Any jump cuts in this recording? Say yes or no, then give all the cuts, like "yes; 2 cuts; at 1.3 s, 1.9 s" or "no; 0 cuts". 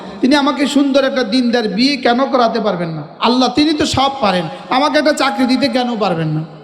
yes; 1 cut; at 3.1 s